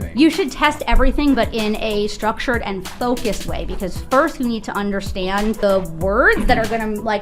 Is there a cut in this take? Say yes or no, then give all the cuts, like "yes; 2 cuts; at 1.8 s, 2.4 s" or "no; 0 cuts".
yes; 1 cut; at 5.6 s